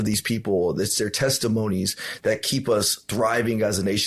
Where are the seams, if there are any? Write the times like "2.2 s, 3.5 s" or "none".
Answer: none